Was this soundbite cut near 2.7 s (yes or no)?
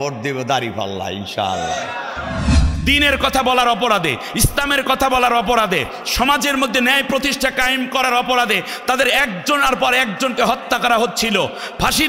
yes